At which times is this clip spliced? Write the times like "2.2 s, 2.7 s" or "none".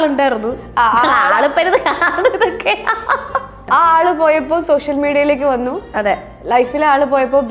3.6 s

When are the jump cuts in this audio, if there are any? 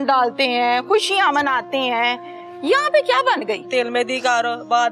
3.6 s

